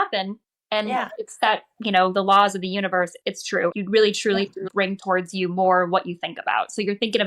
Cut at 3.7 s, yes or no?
yes